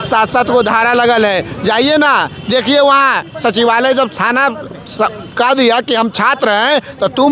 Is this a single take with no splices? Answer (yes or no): yes